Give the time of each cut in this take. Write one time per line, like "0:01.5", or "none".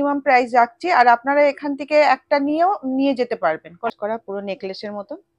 0:03.9